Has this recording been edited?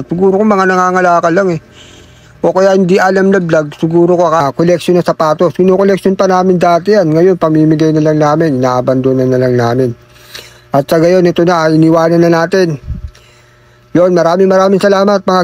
yes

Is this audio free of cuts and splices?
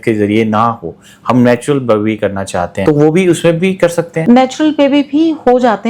no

